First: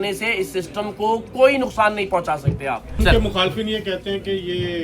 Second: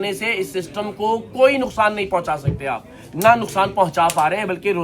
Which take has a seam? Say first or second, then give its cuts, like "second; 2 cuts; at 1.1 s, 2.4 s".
first; 1 cut; at 2.9 s